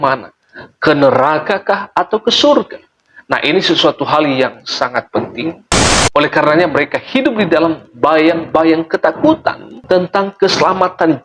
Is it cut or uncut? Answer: cut